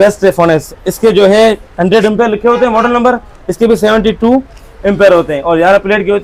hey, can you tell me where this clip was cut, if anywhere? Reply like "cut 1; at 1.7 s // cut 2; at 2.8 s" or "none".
none